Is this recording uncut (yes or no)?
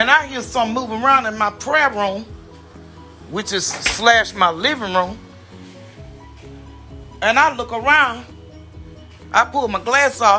yes